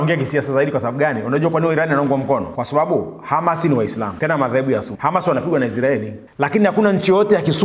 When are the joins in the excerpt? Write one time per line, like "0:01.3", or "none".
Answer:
0:02.5
0:04.1
0:04.9
0:06.2